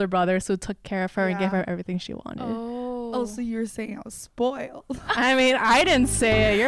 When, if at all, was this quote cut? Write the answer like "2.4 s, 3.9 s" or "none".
none